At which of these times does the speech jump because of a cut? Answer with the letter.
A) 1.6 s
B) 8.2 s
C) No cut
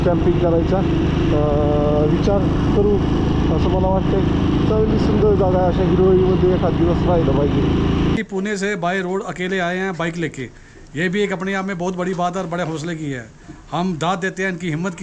B